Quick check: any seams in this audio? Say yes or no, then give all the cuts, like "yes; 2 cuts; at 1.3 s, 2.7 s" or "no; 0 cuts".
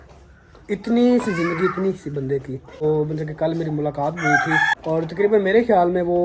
yes; 2 cuts; at 2.8 s, 4.7 s